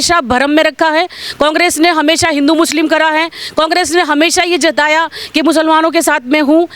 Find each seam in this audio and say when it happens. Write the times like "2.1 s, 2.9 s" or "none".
none